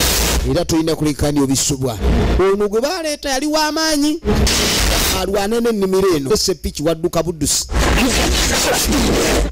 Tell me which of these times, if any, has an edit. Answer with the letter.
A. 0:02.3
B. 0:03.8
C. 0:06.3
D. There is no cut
C